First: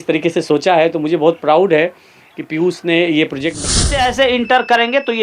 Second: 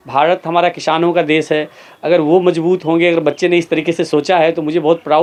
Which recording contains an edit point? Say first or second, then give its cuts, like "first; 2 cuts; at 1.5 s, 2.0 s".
first; 1 cut; at 3.7 s